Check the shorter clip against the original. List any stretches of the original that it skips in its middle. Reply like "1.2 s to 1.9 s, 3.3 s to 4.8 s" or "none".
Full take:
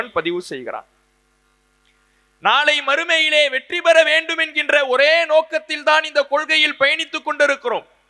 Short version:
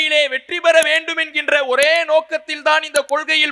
none